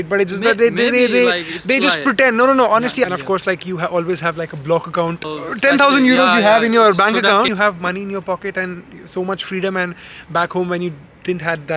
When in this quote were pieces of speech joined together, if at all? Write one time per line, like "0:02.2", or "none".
0:03.1
0:05.2
0:07.5